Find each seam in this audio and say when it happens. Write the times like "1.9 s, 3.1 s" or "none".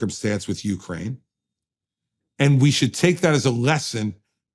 none